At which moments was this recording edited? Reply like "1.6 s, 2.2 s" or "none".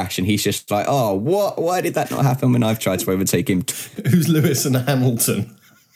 3.7 s